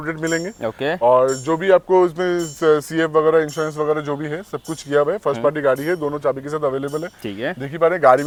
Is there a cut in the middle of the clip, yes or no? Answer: no